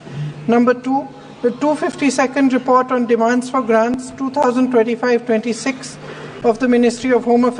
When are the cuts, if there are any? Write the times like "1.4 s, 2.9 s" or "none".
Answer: none